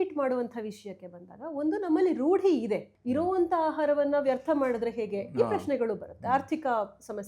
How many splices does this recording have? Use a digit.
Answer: 1